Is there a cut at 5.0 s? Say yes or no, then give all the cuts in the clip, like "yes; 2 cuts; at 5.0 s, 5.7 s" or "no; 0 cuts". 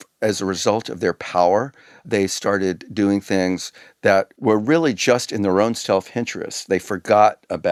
no; 0 cuts